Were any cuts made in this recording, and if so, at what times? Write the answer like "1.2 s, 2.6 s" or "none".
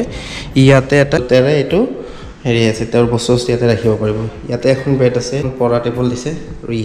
1.2 s, 5.5 s